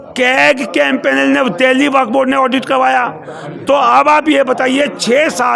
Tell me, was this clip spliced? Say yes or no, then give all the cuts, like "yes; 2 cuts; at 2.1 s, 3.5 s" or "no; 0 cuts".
no; 0 cuts